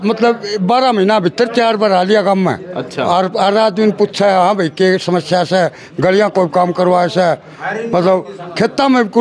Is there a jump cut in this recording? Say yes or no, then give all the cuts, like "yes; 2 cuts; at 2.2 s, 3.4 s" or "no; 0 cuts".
no; 0 cuts